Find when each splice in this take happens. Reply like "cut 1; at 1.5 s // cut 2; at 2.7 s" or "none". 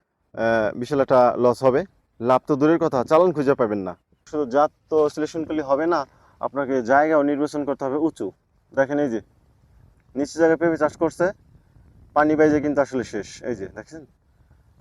cut 1; at 4.2 s